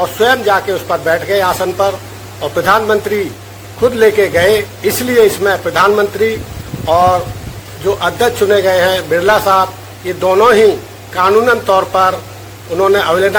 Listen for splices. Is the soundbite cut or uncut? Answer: uncut